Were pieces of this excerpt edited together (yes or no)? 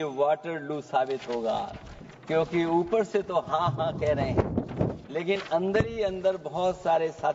no